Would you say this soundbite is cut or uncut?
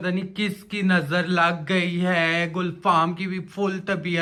uncut